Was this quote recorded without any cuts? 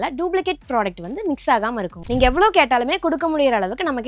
no; 1 cut; at 2.0 s

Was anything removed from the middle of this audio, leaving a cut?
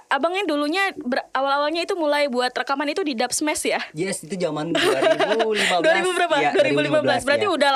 no; 0 cuts

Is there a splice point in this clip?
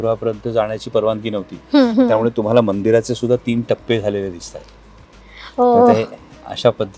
no; 0 cuts

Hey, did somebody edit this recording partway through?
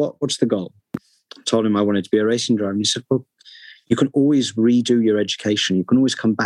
no; 0 cuts

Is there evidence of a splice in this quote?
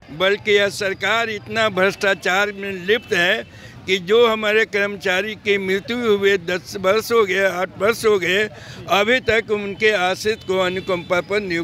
no; 0 cuts

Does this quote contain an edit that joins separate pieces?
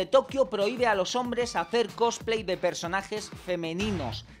no; 0 cuts

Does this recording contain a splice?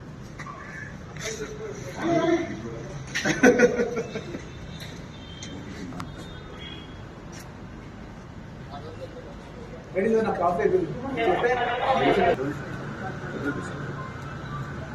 no; 0 cuts

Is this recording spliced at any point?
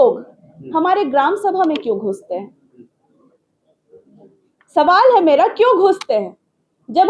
no; 0 cuts

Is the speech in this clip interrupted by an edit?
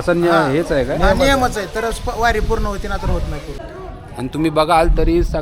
yes; 1 cut; at 3.5 s

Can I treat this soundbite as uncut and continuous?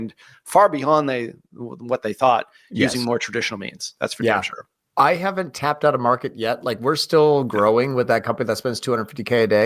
yes; 0 cuts

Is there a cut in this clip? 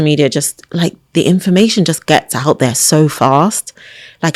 no; 0 cuts

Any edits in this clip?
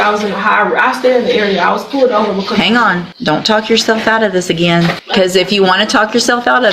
yes; 2 cuts; at 3.1 s, 5.0 s

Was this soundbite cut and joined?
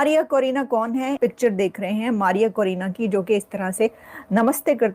yes; 1 cut; at 1.2 s

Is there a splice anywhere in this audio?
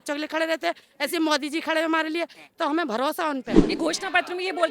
yes; 1 cut; at 3.6 s

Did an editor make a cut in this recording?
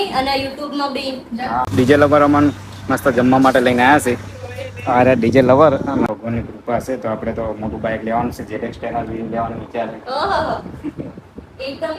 yes; 2 cuts; at 1.7 s, 6.1 s

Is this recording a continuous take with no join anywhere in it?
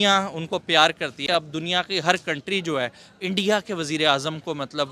no; 1 cut; at 1.4 s

